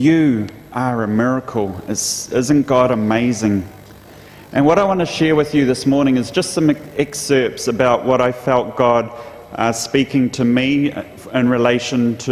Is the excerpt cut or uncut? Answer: cut